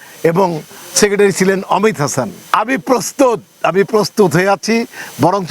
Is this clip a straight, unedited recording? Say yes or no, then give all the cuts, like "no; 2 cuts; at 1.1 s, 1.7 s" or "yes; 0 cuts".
no; 1 cut; at 2.4 s